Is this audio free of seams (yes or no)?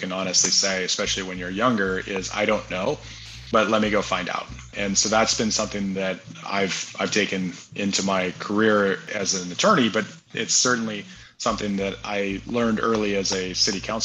no